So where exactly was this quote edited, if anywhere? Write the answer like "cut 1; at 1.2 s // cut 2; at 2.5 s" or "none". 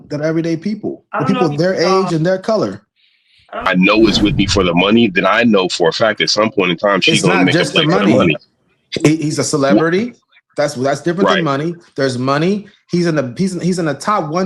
cut 1; at 3.7 s